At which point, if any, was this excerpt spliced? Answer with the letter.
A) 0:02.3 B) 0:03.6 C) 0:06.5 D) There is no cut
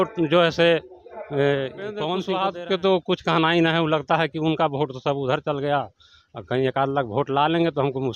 A